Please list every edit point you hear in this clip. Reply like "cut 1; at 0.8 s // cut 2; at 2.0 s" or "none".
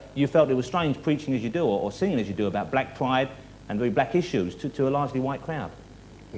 cut 1; at 1.8 s